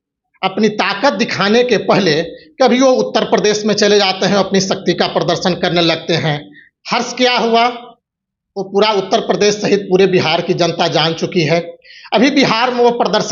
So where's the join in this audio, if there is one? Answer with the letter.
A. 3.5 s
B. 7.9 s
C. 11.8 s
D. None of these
D